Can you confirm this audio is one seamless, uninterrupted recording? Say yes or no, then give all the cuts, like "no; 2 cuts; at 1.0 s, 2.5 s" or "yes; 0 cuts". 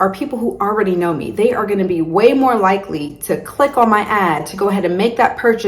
yes; 0 cuts